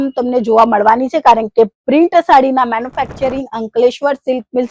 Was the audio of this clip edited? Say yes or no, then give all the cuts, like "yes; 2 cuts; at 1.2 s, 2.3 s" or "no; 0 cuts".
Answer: no; 0 cuts